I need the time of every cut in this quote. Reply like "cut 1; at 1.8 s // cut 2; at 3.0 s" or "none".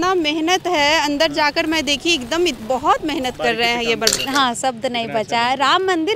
cut 1; at 4.2 s